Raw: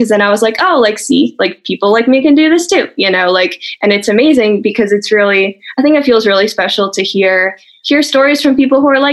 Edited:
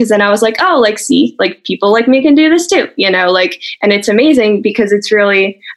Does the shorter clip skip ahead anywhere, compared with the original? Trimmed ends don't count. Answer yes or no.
no